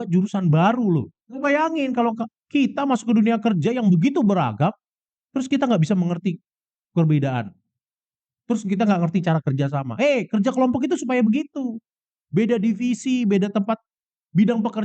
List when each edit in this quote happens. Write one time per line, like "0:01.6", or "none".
0:01.3